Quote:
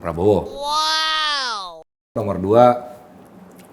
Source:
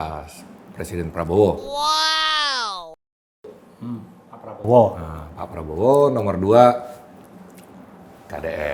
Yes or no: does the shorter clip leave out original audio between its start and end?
yes